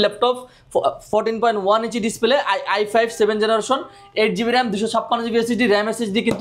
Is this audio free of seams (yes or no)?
yes